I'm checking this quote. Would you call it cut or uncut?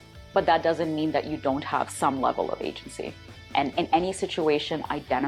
uncut